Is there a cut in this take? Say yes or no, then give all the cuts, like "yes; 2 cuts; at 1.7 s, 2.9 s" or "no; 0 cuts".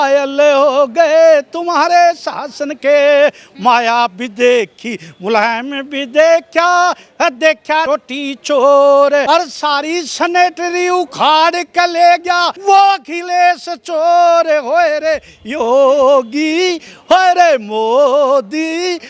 yes; 3 cuts; at 7.9 s, 9.2 s, 12.5 s